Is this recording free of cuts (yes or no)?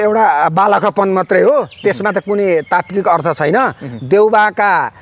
yes